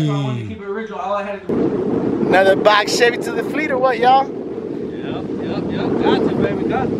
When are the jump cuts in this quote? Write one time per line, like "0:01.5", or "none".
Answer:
0:01.5